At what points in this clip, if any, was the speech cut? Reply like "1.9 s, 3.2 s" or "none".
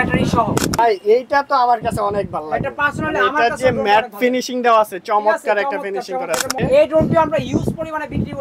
0.8 s, 6.5 s